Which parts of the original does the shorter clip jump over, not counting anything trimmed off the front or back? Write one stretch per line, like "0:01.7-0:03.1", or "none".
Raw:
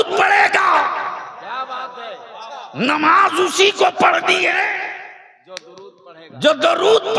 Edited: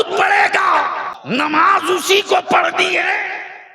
0:01.1-0:02.6